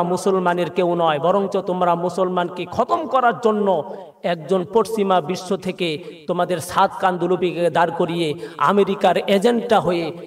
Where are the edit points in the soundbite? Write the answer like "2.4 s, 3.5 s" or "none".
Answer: none